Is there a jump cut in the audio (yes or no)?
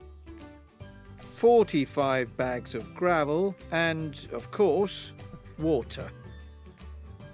yes